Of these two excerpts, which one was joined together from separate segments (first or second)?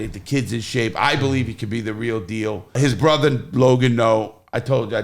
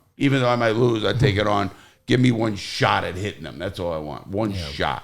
first